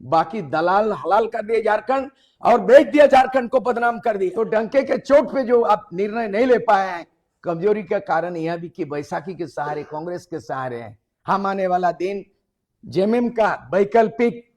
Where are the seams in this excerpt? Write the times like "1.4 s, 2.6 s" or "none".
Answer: 4.3 s

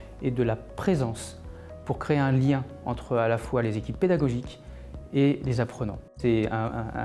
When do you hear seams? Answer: 6.1 s

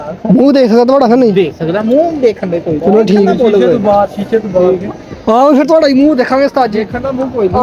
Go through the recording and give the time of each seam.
none

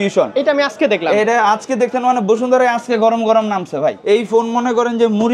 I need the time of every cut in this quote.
4.0 s

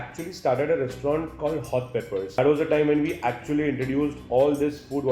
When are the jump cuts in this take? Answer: 2.4 s

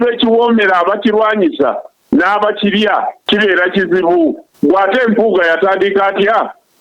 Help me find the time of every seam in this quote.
3.2 s, 4.5 s

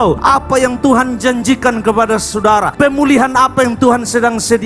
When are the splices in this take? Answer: none

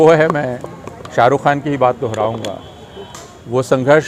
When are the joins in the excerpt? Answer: none

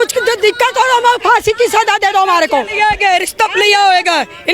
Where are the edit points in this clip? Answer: none

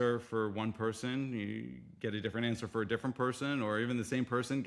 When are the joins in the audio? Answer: none

